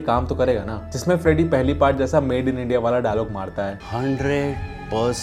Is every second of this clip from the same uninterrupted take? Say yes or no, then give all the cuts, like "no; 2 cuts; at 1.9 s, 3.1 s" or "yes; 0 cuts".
yes; 0 cuts